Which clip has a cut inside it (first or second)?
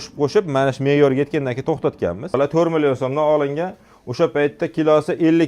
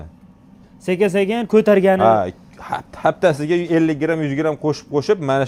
first